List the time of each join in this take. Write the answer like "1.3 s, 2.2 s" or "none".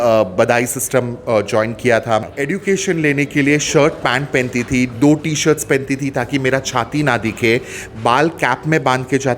2.3 s